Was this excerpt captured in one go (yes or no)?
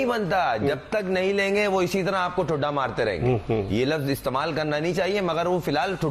yes